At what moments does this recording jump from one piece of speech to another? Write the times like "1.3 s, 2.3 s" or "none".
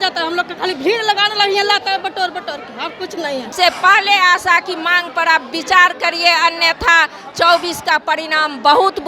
3.5 s